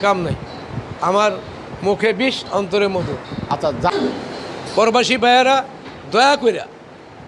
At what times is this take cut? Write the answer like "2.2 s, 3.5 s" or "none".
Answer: 3.9 s